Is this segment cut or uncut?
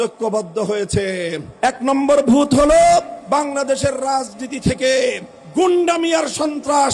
cut